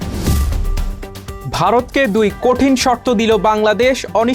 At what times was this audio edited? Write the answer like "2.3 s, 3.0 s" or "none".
0.9 s